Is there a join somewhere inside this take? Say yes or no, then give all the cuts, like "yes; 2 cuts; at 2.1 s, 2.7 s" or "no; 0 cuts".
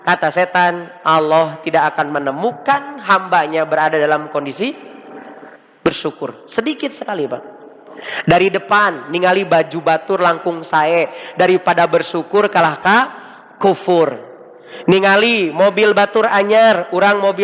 no; 0 cuts